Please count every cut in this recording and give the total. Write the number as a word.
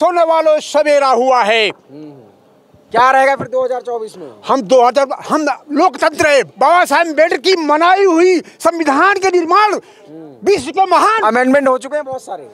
zero